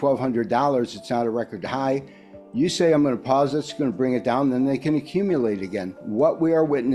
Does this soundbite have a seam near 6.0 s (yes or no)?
yes